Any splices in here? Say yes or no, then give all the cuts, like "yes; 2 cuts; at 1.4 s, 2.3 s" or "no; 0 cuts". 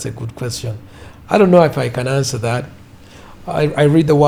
no; 0 cuts